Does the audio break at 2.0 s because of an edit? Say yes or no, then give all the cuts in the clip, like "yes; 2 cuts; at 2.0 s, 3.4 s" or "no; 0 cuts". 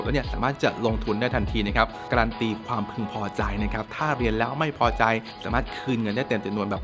yes; 2 cuts; at 2.0 s, 5.3 s